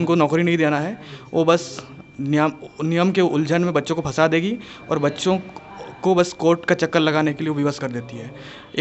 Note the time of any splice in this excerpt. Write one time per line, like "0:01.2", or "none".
none